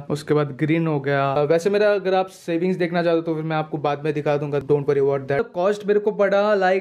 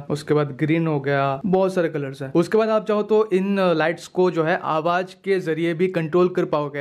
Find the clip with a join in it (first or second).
first